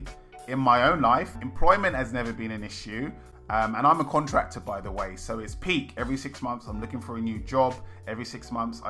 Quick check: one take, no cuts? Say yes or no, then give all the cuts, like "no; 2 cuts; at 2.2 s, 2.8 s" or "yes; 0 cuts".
no; 1 cut; at 1.4 s